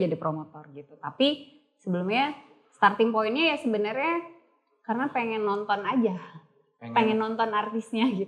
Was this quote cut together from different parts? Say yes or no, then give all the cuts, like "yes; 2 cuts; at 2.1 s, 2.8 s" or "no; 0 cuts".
no; 0 cuts